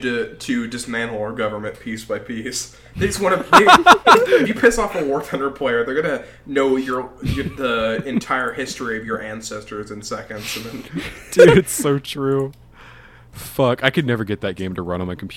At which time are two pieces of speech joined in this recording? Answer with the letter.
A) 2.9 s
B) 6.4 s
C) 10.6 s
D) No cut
D